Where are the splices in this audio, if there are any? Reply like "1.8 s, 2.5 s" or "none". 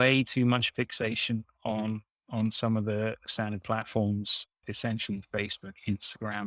3.3 s, 4.6 s